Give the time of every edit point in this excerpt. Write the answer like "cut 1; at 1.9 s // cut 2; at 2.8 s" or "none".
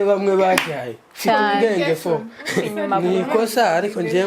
cut 1; at 2.7 s